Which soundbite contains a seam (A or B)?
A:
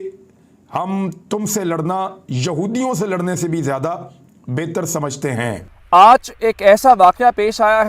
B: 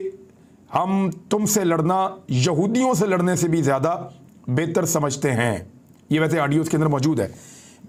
A